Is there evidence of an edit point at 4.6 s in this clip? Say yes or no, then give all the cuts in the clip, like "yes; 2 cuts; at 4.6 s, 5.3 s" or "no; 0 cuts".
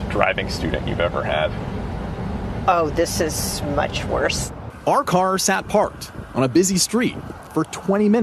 yes; 1 cut; at 4.6 s